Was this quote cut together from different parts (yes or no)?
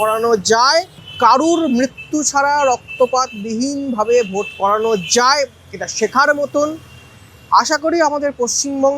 no